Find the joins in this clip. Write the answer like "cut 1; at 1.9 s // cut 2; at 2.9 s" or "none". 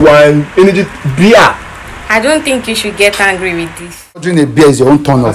cut 1; at 4.3 s